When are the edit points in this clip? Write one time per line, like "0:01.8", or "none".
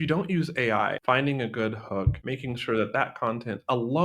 0:01.0
0:02.2